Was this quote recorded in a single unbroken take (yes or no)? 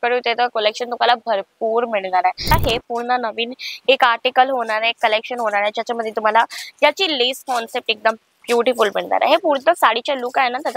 no